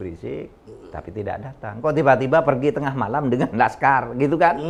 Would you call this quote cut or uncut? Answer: uncut